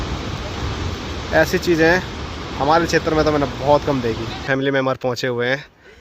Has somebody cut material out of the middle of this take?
yes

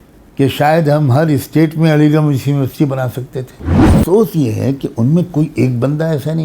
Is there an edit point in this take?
yes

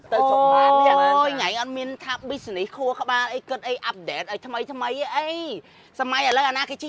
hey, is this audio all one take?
yes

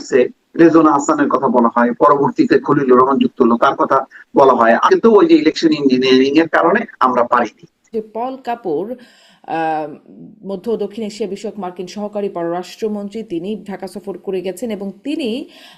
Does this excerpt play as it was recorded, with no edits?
no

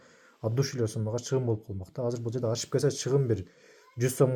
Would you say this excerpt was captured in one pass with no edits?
yes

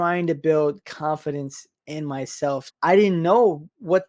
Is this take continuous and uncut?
no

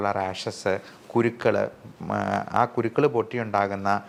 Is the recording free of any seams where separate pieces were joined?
yes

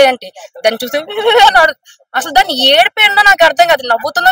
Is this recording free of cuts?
yes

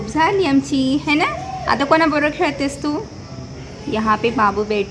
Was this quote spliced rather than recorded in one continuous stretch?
no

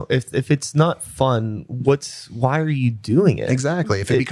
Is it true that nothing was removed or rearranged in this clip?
yes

